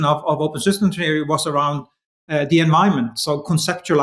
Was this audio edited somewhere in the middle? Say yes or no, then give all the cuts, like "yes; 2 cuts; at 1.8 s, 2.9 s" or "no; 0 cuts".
no; 0 cuts